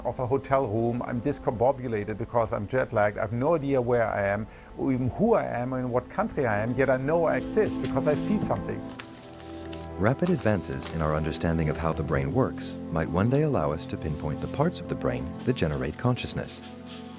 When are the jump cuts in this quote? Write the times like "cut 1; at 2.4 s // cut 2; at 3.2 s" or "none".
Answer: none